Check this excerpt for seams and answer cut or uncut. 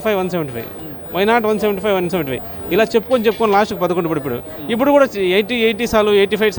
uncut